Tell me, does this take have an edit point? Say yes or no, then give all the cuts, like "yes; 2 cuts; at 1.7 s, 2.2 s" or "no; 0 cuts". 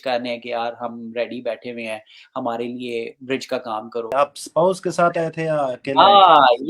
yes; 1 cut; at 4.1 s